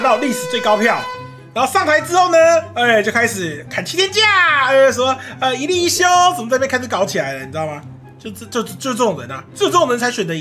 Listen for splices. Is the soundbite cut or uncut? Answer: cut